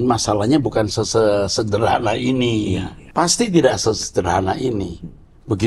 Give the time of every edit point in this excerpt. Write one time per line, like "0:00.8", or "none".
0:03.0